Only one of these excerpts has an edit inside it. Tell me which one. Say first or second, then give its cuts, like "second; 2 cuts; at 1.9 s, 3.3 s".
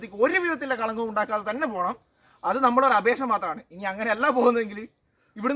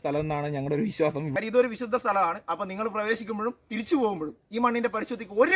second; 1 cut; at 1.3 s